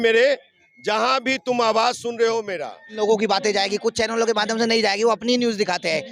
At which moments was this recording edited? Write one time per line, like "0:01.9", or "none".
0:02.8